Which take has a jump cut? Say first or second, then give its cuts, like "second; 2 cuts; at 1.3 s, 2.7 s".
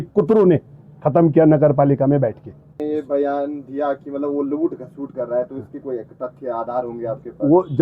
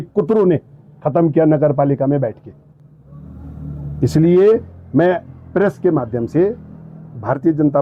first; 1 cut; at 2.7 s